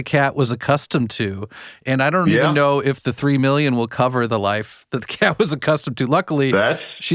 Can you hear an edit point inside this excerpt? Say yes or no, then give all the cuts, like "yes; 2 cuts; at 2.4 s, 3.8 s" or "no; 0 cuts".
no; 0 cuts